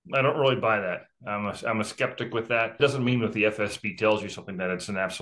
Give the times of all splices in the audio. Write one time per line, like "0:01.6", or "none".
0:02.8

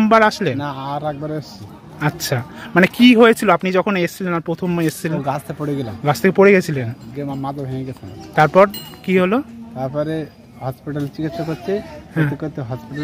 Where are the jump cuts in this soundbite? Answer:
none

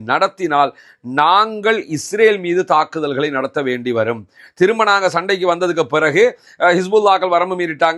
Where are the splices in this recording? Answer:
none

